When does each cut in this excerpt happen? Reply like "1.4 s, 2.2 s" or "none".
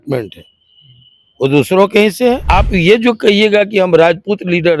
2.4 s